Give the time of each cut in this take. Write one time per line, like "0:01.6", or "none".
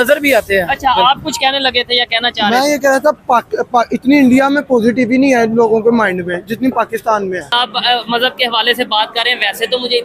0:07.5